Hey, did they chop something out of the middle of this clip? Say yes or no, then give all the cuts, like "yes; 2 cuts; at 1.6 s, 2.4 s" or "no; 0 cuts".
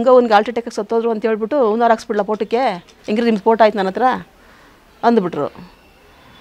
no; 0 cuts